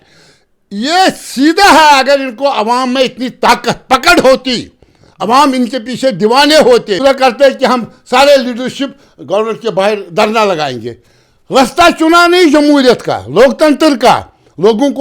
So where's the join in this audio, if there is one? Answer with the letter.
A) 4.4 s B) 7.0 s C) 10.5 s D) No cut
B